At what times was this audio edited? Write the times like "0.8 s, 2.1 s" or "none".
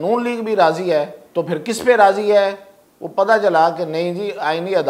1.2 s